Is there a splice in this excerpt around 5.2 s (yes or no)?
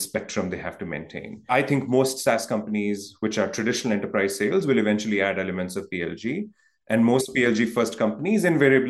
no